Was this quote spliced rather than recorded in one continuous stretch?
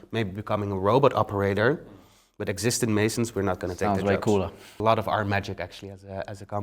yes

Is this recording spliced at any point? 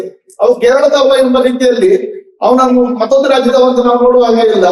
no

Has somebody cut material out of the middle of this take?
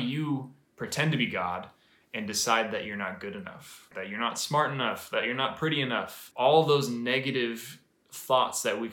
yes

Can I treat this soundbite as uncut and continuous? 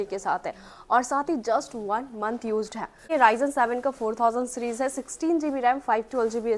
no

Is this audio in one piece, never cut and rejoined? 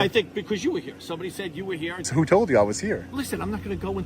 no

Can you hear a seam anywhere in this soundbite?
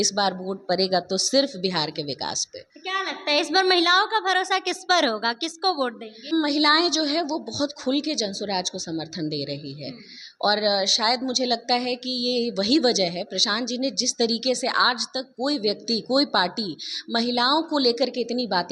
no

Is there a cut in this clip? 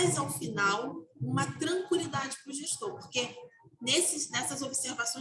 no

